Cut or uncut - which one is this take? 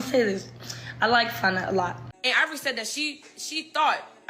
cut